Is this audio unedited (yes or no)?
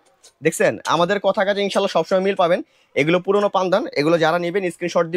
yes